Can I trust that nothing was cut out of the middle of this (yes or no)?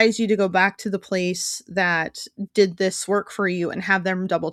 yes